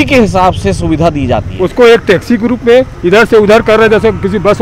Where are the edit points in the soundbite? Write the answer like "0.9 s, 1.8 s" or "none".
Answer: 1.5 s